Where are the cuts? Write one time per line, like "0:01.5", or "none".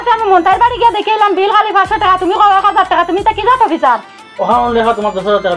none